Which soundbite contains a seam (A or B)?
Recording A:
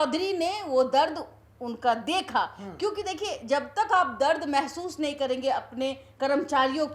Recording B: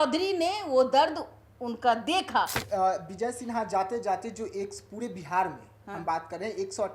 B